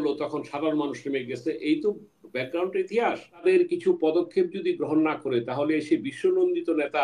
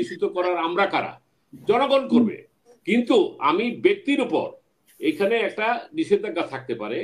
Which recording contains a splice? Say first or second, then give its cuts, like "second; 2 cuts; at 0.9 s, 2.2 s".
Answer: first; 1 cut; at 3.4 s